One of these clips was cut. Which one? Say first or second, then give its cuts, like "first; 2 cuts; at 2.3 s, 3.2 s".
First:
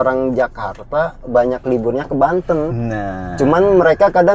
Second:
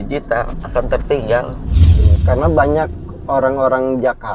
second; 1 cut; at 2.1 s